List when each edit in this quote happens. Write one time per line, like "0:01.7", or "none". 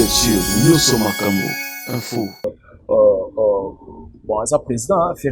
0:02.5